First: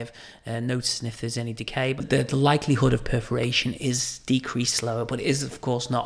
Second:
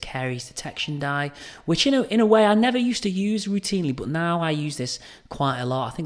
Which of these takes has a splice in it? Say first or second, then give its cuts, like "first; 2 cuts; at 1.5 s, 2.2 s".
first; 1 cut; at 2.0 s